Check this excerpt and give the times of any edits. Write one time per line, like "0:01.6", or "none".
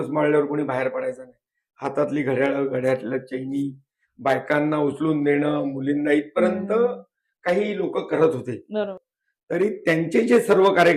0:09.0